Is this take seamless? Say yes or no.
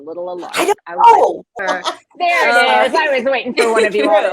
no